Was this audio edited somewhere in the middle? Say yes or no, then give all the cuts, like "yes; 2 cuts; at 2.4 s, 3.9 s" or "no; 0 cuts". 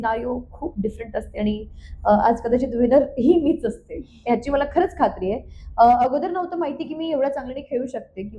no; 0 cuts